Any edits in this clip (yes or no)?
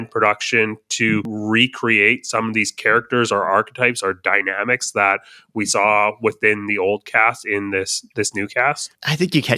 yes